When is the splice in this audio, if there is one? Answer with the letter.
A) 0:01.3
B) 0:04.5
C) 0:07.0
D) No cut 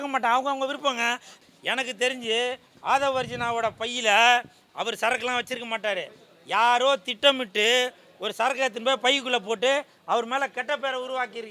A